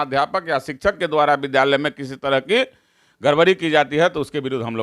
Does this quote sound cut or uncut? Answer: uncut